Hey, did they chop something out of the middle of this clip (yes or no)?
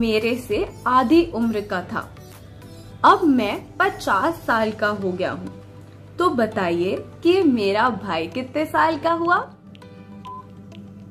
no